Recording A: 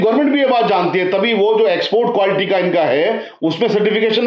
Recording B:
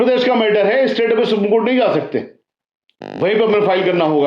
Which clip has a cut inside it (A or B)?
B